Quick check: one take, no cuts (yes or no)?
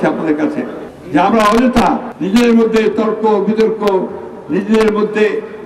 yes